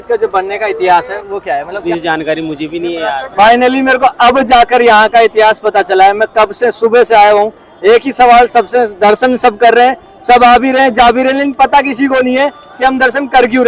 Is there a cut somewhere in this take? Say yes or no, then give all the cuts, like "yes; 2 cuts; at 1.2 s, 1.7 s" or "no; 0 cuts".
yes; 2 cuts; at 1.8 s, 3.3 s